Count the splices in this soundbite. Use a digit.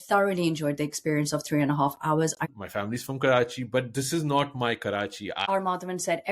2